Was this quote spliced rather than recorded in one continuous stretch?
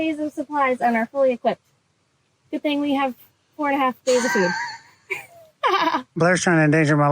yes; 1 cut; at 6.1 s

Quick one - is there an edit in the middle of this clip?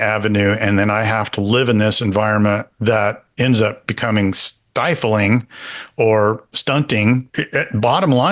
yes; 1 cut; at 7.3 s

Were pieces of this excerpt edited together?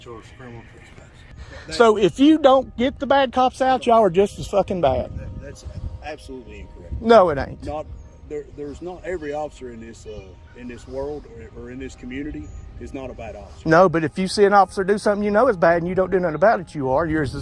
yes; 1 cut; at 1.3 s

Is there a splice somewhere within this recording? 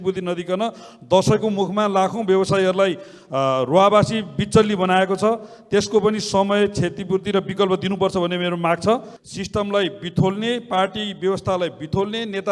yes; 1 cut; at 9.2 s

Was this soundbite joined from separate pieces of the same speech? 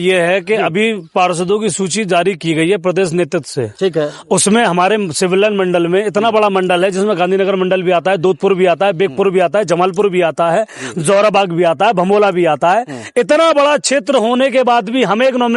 no; 0 cuts

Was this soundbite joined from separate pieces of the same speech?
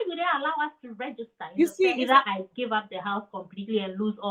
yes; 1 cut; at 1.9 s

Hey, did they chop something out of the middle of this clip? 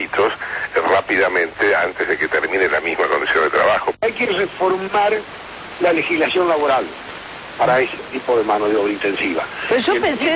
yes; 2 cuts; at 4.0 s, 9.5 s

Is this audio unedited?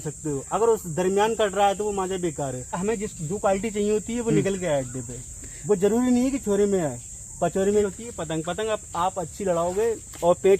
no; 2 cuts; at 2.8 s, 7.9 s

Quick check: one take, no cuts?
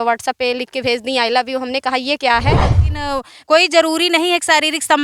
no; 1 cut; at 2.8 s

